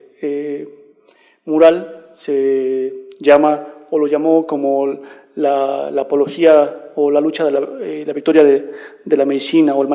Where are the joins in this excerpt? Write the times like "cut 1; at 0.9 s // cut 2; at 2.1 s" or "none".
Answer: cut 1; at 5.9 s